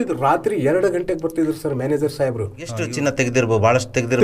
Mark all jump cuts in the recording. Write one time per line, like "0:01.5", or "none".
0:02.8